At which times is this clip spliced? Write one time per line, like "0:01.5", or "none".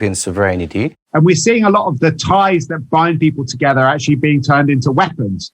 0:01.0